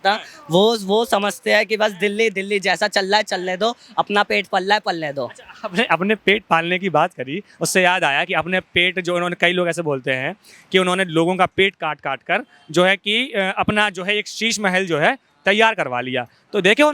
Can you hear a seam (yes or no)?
no